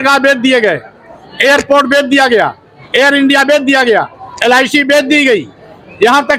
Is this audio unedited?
yes; 0 cuts

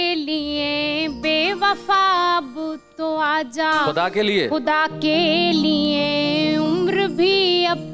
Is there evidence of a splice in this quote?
no; 0 cuts

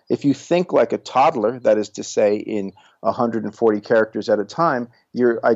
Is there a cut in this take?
no; 0 cuts

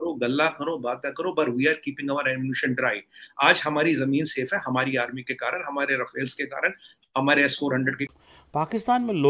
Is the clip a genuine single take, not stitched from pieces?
no; 1 cut; at 8.0 s

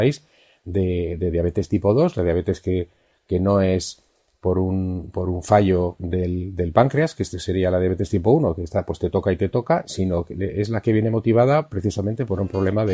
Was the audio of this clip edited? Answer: no; 0 cuts

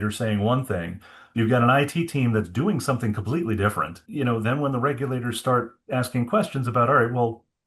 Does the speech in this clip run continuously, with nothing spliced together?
no; 1 cut; at 4.3 s

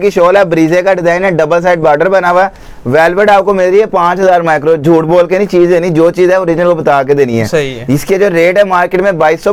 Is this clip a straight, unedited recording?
yes; 0 cuts

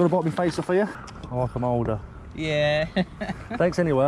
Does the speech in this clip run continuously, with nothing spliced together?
no; 1 cut; at 1.0 s

